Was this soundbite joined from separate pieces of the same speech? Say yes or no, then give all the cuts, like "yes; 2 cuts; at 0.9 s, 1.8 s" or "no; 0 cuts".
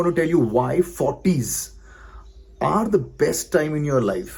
no; 0 cuts